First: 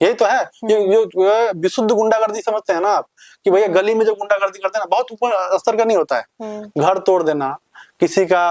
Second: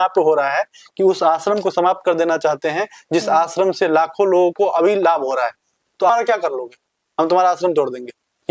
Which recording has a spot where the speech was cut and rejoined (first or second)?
second